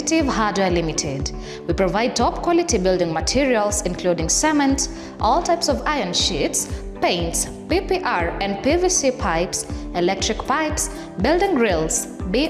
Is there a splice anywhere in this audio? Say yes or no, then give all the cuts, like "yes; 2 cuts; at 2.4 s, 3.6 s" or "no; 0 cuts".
no; 0 cuts